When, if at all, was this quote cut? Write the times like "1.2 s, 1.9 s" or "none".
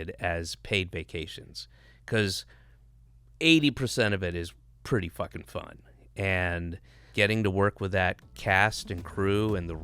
7.0 s